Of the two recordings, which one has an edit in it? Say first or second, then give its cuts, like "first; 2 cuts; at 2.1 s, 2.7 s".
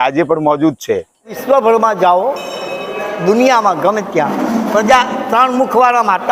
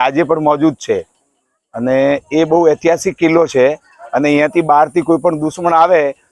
first; 1 cut; at 1.4 s